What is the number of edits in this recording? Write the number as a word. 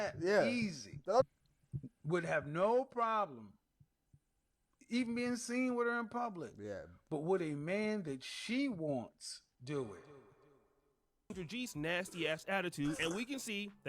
two